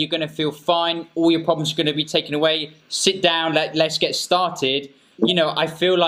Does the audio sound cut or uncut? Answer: uncut